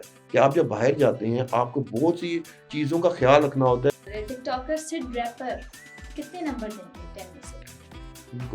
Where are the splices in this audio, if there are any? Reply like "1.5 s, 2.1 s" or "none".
3.9 s

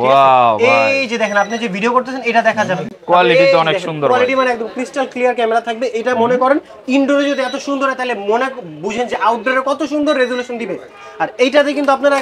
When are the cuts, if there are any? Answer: none

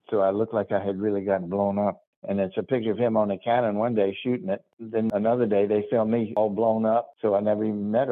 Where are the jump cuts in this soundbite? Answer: 2.1 s, 5.0 s, 6.4 s, 7.1 s

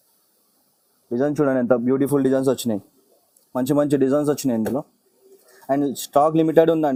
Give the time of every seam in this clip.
none

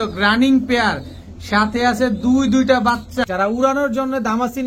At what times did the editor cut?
3.3 s

